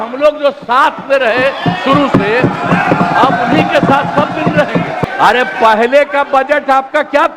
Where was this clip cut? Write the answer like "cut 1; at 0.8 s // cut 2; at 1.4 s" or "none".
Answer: cut 1; at 5.0 s